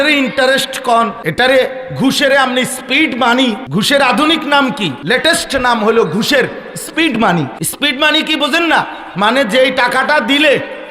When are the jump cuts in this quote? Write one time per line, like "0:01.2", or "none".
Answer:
0:01.2
0:03.6
0:05.0
0:07.6